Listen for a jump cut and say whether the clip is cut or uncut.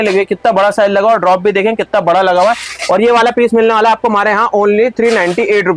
uncut